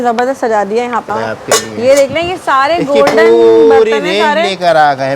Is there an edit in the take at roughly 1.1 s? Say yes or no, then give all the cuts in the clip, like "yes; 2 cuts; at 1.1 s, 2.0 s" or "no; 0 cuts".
yes; 1 cut; at 1.1 s